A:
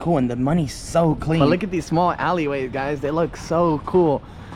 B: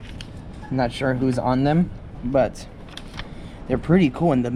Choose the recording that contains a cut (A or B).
A